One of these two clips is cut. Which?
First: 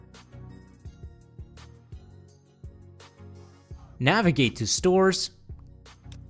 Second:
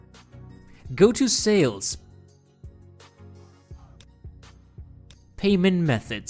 second; 4 cuts; at 0.9 s, 1.9 s, 3.9 s, 5.4 s

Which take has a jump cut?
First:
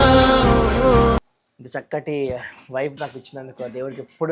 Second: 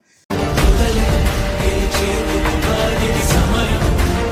first; 1 cut; at 1.3 s

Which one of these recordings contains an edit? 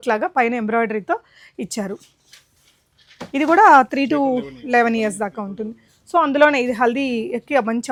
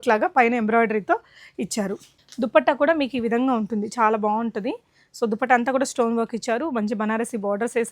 second; 1 cut; at 2.2 s

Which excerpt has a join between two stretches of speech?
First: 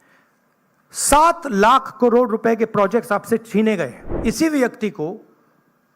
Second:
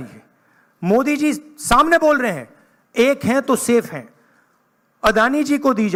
first; 1 cut; at 4.0 s

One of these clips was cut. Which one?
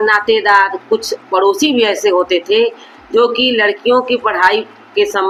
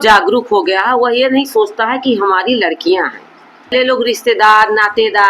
second; 1 cut; at 3.7 s

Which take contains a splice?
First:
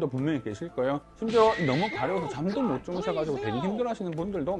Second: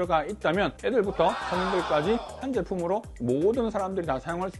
first; 1 cut; at 1.1 s

